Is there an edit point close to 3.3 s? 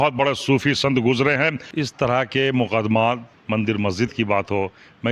yes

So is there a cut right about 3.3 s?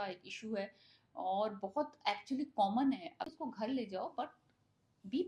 yes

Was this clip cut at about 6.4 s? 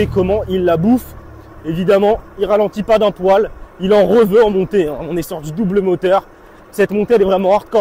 no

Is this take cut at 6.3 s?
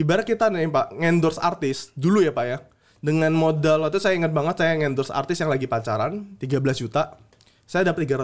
yes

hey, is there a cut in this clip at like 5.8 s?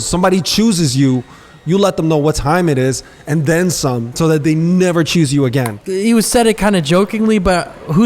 yes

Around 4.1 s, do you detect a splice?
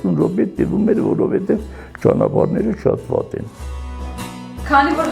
yes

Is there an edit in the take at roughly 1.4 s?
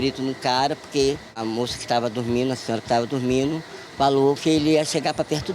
yes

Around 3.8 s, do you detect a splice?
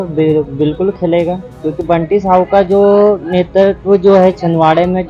no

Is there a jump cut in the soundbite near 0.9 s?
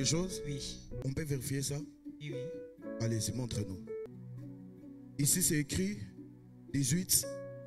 yes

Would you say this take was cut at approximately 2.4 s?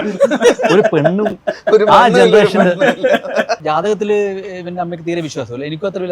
no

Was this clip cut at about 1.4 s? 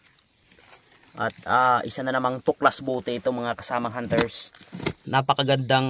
no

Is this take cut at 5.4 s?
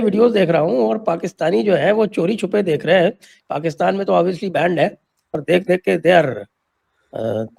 yes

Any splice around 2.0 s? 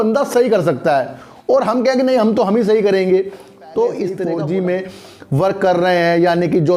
no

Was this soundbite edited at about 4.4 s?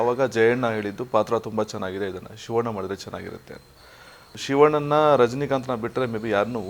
yes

